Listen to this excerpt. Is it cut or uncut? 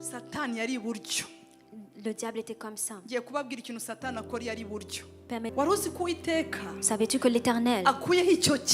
cut